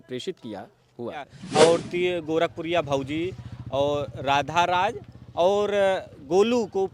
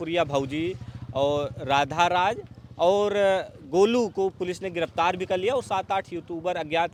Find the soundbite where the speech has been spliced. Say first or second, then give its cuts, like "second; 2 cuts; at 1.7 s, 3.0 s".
first; 1 cut; at 1.4 s